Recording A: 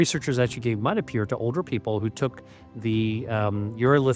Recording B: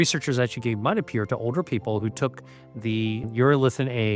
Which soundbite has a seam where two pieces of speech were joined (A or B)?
B